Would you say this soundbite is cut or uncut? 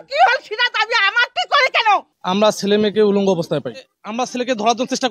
cut